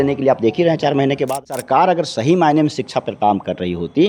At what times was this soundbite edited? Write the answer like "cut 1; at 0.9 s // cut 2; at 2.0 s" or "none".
cut 1; at 1.3 s